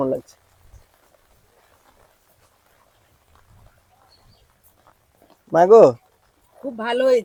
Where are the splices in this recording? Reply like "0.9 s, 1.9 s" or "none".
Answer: none